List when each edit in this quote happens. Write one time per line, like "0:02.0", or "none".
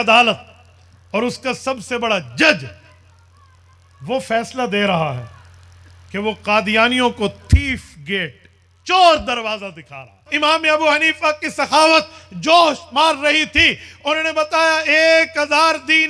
0:10.3